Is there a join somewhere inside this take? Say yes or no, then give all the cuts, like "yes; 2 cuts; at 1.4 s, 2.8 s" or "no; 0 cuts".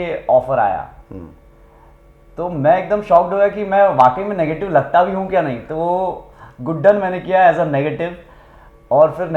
no; 0 cuts